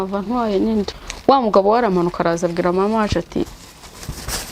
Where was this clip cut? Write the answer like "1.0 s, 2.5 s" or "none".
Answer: 1.0 s